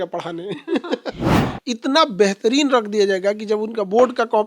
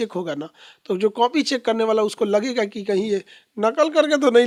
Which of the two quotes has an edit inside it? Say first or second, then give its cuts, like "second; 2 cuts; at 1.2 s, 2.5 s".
first; 1 cut; at 1.3 s